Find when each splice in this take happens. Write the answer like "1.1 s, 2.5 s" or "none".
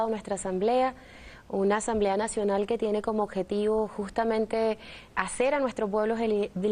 none